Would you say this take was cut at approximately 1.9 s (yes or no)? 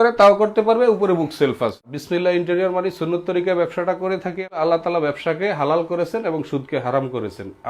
yes